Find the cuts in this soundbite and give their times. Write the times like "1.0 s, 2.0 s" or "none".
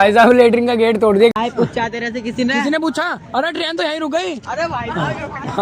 1.3 s